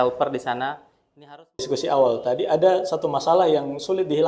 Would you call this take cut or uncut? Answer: cut